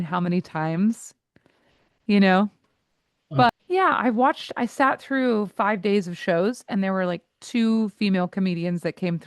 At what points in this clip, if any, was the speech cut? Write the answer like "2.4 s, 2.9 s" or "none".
3.5 s